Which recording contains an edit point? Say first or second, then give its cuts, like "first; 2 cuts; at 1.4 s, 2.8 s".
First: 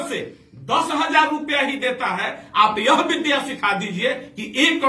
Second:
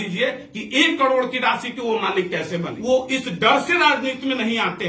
second; 1 cut; at 2.8 s